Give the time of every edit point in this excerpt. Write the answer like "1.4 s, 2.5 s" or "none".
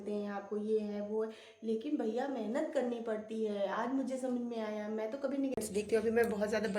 5.6 s

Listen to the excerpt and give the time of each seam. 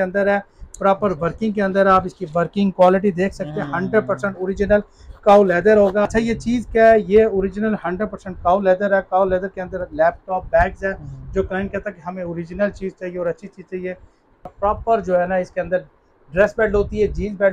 6.1 s, 14.5 s

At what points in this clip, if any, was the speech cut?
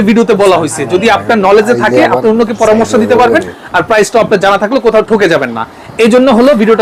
none

